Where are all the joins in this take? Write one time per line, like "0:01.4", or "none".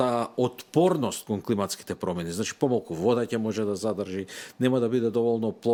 none